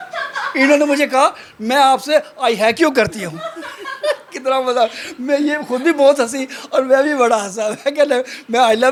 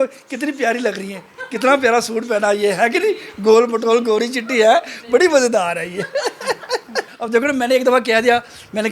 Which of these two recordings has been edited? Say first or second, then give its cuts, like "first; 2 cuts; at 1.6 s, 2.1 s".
second; 1 cut; at 7.1 s